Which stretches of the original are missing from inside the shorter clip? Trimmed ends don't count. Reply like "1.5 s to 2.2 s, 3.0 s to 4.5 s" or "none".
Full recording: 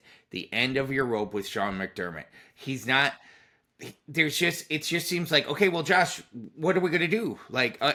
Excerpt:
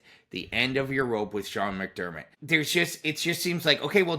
2.3 s to 3.9 s